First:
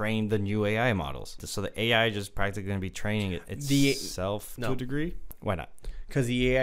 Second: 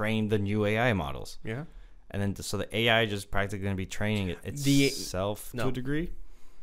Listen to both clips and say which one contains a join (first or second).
first